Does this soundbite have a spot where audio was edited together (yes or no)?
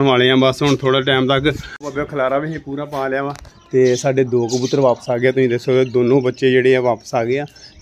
yes